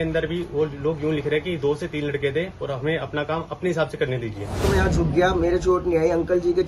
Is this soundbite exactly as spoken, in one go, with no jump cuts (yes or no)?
no